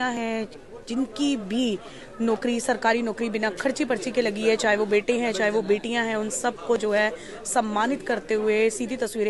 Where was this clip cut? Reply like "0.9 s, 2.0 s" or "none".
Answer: none